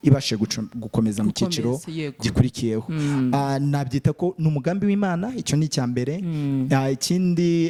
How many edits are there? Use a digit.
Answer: 0